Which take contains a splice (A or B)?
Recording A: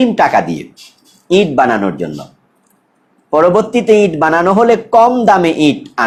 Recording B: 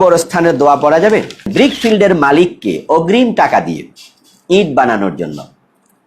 B